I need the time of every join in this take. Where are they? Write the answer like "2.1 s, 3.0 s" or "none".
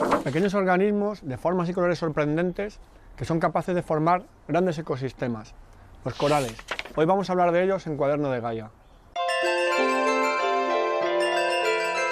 3.3 s